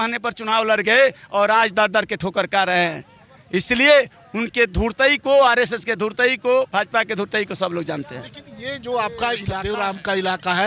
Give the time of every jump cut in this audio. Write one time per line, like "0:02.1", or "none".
0:09.5